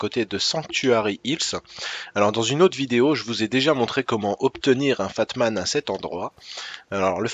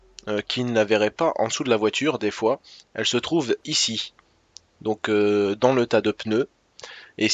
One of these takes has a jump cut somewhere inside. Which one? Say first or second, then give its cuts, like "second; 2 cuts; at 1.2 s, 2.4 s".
second; 1 cut; at 2.1 s